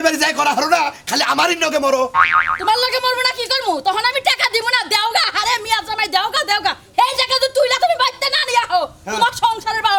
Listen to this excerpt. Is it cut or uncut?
uncut